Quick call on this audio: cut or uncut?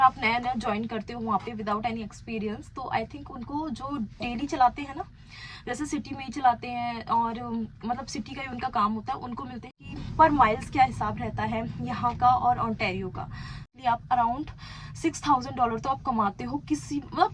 cut